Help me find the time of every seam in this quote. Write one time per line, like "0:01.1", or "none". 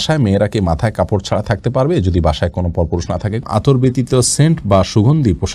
0:03.4